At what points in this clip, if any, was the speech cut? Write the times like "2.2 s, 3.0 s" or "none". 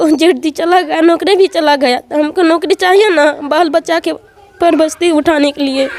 none